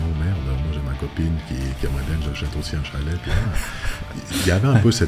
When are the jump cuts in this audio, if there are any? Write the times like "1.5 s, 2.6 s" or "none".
none